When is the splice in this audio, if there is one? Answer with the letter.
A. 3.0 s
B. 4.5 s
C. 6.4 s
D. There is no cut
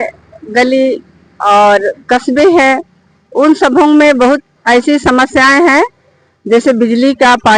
B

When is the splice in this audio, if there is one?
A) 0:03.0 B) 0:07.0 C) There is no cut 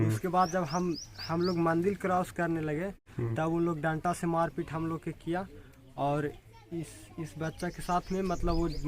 A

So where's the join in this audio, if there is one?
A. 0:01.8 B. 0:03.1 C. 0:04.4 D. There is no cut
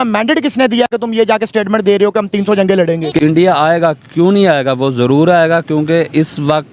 B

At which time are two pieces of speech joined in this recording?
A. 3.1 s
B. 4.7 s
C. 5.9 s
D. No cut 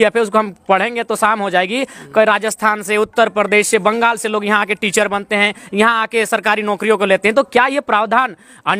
D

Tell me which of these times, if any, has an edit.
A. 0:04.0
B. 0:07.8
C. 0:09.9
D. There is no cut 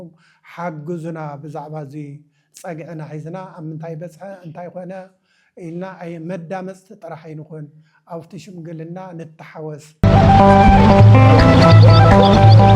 C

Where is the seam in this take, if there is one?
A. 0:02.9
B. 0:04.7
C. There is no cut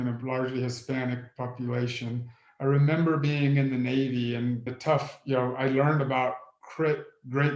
B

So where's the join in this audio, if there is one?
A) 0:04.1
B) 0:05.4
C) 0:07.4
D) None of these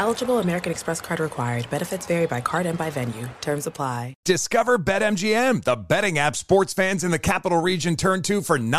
A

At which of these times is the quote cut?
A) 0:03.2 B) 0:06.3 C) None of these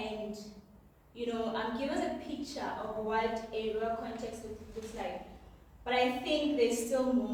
C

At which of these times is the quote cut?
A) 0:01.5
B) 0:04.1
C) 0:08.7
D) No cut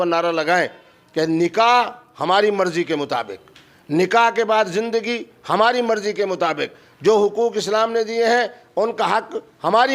D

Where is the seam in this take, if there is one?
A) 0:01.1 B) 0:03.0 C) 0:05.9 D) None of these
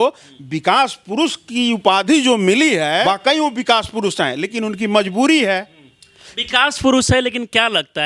B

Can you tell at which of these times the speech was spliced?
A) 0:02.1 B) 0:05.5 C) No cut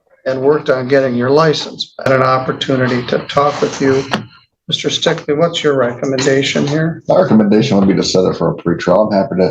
A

